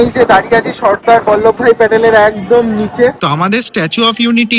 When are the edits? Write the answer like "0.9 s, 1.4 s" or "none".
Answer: 3.2 s